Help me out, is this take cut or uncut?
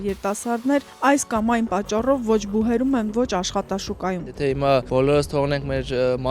cut